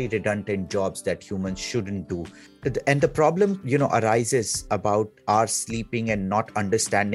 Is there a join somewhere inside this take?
yes; 1 cut; at 2.4 s

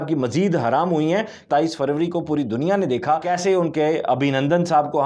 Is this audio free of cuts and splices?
no; 2 cuts; at 1.4 s, 3.3 s

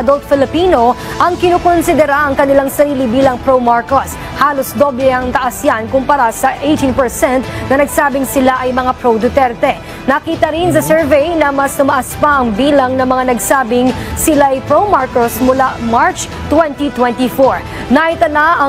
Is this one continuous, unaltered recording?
yes; 0 cuts

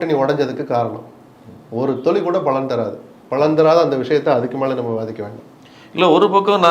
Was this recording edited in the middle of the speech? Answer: no; 0 cuts

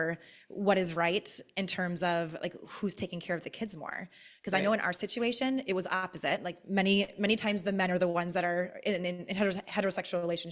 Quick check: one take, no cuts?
yes; 0 cuts

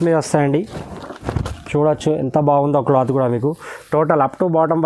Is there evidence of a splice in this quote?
no; 0 cuts

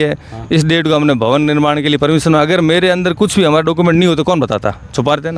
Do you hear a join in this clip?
no; 0 cuts

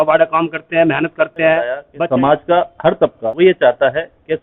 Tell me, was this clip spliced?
yes; 2 cuts; at 1.9 s, 3.3 s

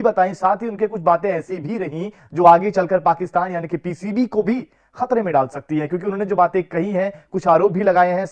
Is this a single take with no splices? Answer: yes; 0 cuts

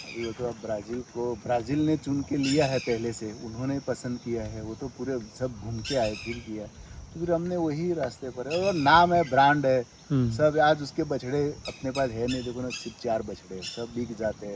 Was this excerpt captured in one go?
yes; 0 cuts

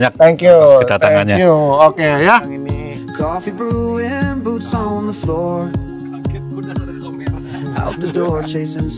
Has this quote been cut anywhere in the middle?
yes; 1 cut; at 2.6 s

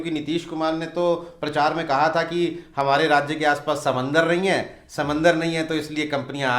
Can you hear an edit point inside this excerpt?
no; 0 cuts

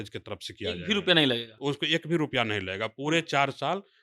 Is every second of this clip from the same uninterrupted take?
yes; 0 cuts

